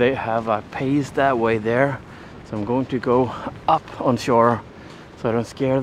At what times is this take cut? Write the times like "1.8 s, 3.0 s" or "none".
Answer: none